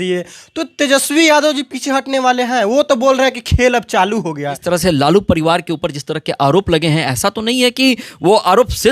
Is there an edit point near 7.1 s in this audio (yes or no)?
no